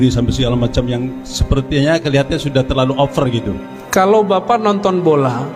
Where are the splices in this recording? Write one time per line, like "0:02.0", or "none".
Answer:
0:03.7